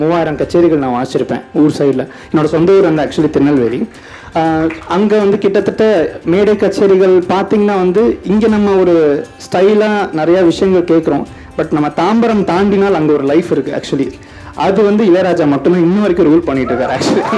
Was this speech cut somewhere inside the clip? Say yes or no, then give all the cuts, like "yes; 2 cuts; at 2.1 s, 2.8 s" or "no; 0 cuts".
no; 0 cuts